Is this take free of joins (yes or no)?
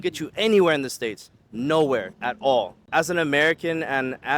no